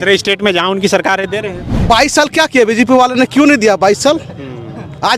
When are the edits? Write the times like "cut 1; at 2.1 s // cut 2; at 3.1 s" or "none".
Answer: cut 1; at 1.7 s